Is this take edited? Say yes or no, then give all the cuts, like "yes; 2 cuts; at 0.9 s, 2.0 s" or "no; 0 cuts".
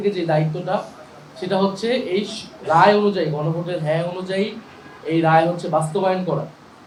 no; 0 cuts